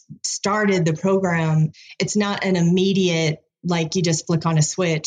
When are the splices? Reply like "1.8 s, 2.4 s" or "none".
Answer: none